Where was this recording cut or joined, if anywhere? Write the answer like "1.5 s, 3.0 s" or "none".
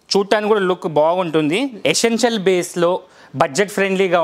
1.7 s